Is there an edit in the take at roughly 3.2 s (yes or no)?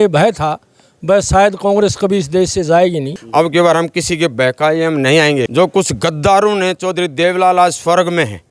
yes